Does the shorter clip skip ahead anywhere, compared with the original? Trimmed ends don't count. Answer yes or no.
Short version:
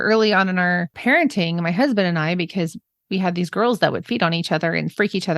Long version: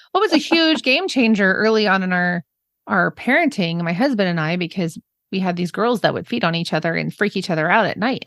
yes